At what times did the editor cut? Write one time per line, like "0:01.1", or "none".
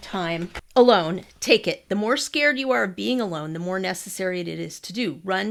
none